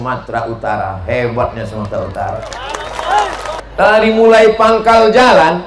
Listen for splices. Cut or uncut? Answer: cut